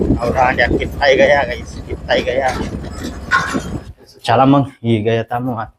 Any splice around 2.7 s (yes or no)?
no